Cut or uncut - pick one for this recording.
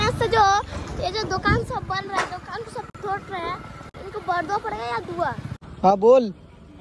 cut